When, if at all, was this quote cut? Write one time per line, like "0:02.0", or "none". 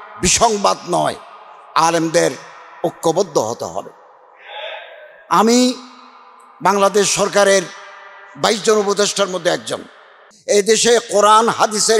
0:10.3

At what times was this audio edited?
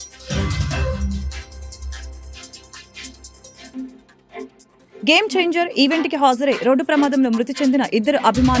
0:01.1

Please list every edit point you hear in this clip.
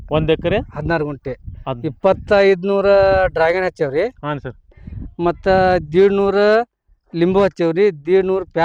none

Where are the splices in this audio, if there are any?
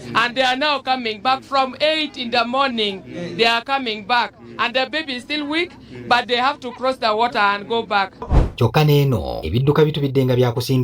0:08.3

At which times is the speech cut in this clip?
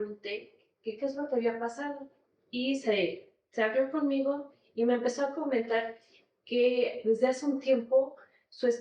none

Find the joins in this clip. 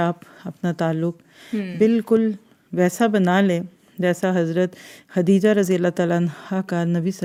none

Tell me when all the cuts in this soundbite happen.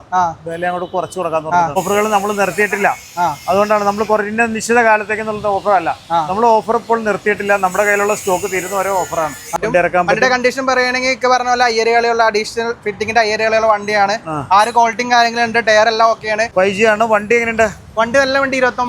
0:01.8
0:09.5
0:16.5

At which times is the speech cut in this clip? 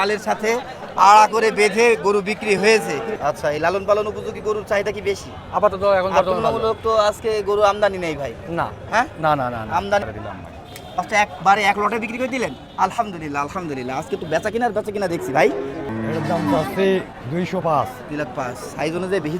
0:03.1
0:10.1
0:15.9

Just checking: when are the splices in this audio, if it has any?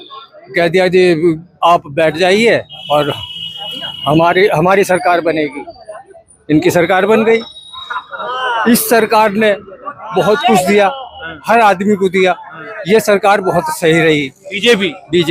none

